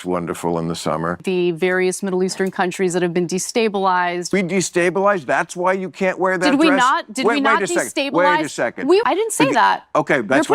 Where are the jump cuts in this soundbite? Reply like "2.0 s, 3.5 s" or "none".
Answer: 1.2 s, 4.3 s, 9.0 s

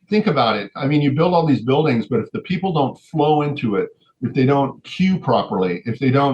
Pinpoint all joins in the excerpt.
none

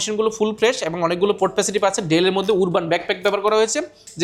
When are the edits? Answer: none

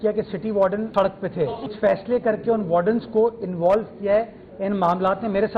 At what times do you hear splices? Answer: 1.7 s

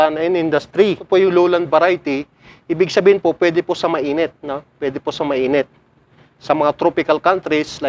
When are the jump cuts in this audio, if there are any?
1.0 s

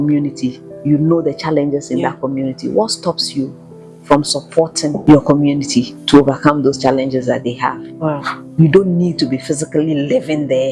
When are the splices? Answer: 5.0 s, 6.0 s, 8.3 s

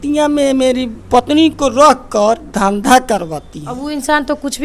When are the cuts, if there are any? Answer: none

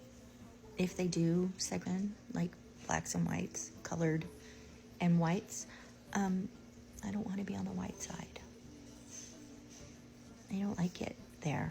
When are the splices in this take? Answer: 1.8 s

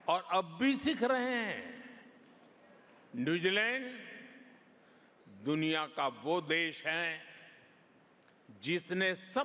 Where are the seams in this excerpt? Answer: none

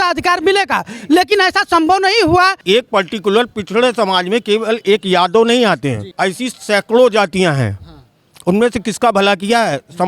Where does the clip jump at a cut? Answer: 2.6 s, 6.0 s

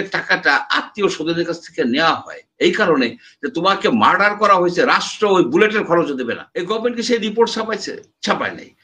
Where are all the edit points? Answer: 6.5 s

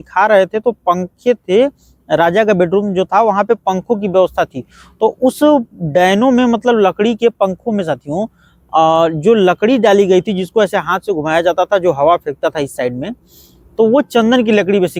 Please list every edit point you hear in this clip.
none

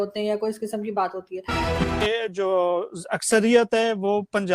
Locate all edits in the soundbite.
1.8 s

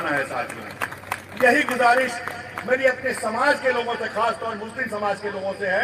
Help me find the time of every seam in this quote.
none

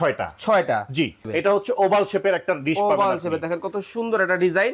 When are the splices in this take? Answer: 1.2 s

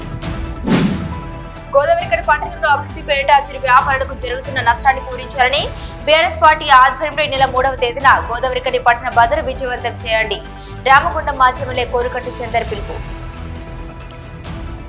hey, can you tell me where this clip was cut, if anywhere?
0.9 s

